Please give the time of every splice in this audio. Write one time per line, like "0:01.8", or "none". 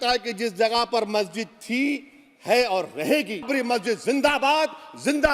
0:03.5

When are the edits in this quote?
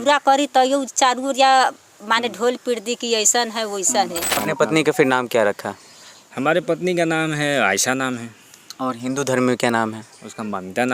0:04.4

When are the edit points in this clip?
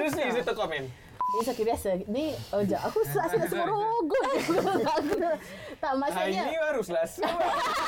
0:01.3

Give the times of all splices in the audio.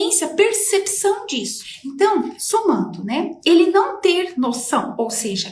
0:02.3

